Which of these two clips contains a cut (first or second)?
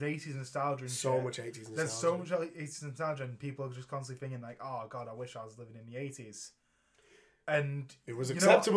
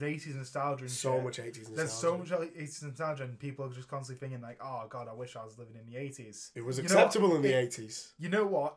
second